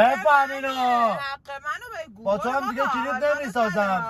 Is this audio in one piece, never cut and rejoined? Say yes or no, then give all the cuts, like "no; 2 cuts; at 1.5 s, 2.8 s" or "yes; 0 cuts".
yes; 0 cuts